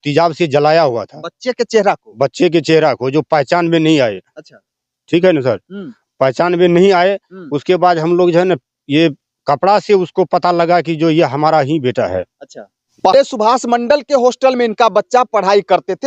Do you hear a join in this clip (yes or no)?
no